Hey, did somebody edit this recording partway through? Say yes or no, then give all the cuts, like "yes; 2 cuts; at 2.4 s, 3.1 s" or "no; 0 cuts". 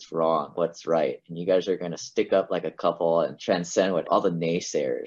yes; 1 cut; at 4.0 s